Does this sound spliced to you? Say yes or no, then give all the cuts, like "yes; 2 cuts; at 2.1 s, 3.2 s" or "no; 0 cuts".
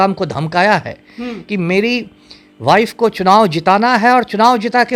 no; 0 cuts